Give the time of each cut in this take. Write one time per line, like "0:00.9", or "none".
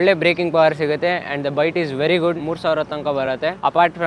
0:02.4